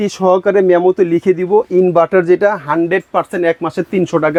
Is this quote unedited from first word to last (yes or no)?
yes